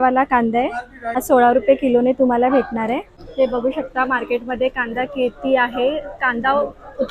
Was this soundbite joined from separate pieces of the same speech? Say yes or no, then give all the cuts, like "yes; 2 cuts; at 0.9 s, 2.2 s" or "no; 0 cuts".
yes; 2 cuts; at 1.0 s, 3.2 s